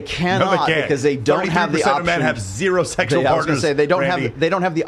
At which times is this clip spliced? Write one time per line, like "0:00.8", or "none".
none